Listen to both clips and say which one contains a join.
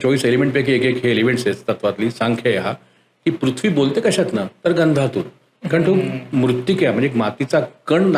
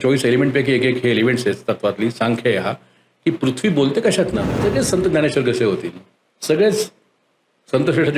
second; 1 cut; at 4.5 s

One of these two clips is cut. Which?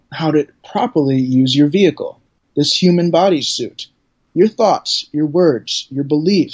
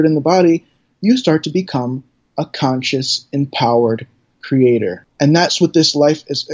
second; 1 cut; at 5.0 s

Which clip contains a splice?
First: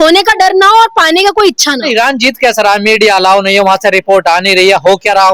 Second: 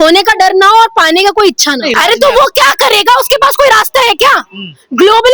second; 1 cut; at 1.9 s

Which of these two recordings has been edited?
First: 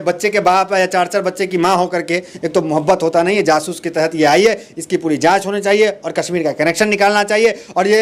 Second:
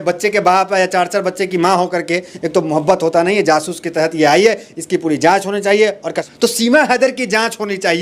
second; 1 cut; at 6.1 s

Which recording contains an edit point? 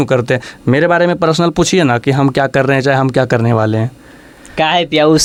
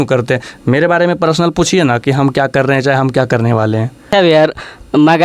second; 1 cut; at 4.1 s

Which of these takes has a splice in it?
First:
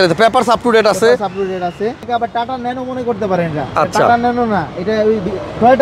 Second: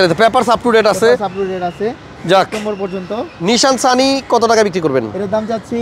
first; 1 cut; at 2.0 s

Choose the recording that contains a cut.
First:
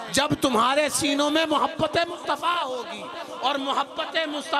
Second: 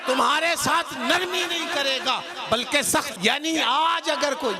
second; 1 cut; at 3.1 s

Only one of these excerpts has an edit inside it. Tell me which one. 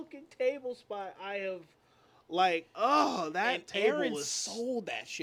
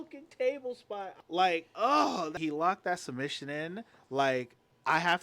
second; 2 cuts; at 1.2 s, 2.3 s

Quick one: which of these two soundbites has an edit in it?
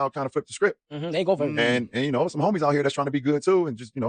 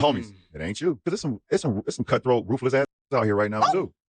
second; 1 cut; at 1.0 s

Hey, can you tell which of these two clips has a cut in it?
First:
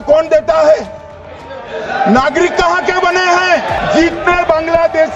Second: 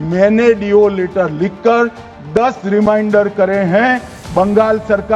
first; 1 cut; at 3.8 s

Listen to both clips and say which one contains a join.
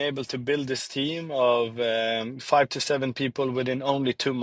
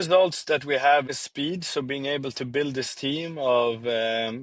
second; 1 cut; at 1.1 s

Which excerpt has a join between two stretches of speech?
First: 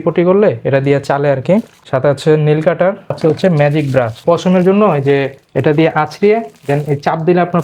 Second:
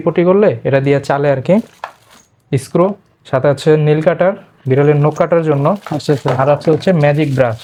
first; 3 cuts; at 1.8 s, 3.2 s, 4.2 s

